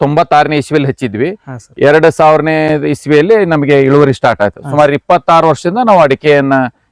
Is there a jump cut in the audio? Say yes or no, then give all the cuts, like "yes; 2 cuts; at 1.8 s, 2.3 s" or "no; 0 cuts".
no; 0 cuts